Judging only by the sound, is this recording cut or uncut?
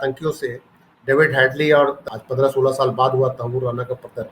cut